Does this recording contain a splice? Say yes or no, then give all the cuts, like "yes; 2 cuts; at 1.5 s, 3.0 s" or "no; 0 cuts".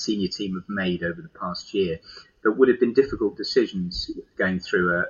no; 0 cuts